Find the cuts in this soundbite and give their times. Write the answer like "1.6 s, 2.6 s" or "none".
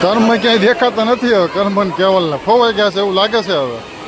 none